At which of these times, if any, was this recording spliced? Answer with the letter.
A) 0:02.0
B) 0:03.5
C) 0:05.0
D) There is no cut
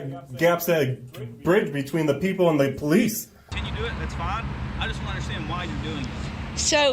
B